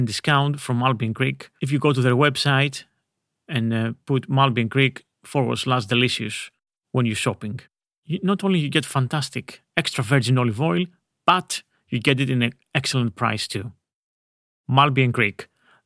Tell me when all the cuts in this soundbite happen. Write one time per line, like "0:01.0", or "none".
none